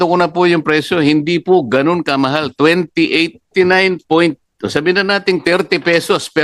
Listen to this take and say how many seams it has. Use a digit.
1